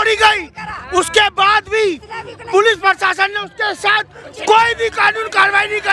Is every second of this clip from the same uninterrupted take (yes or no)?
yes